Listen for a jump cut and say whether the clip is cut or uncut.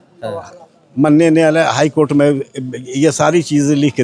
uncut